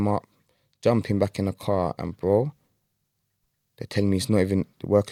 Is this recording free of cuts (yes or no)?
yes